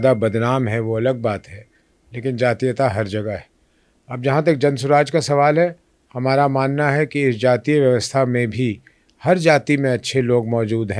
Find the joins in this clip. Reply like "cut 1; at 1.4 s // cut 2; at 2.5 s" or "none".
none